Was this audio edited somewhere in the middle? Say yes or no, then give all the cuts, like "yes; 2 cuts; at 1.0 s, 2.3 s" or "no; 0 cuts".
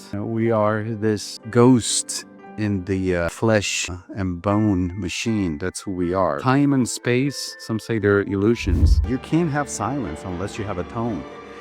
yes; 3 cuts; at 1.3 s, 3.3 s, 8.9 s